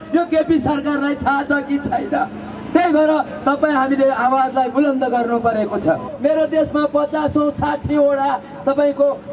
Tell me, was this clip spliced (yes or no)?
yes